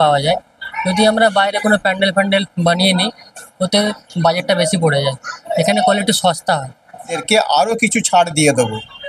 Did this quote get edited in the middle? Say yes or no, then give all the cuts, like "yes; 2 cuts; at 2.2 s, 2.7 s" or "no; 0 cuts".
yes; 1 cut; at 7.1 s